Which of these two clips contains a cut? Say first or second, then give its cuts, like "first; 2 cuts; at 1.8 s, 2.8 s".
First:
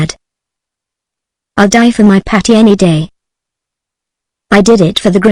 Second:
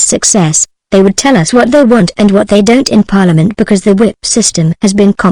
second; 1 cut; at 3.2 s